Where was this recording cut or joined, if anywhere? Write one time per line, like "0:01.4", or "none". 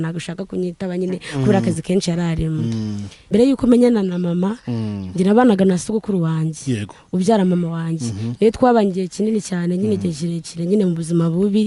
0:03.3